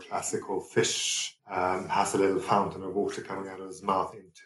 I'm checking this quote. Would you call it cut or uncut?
cut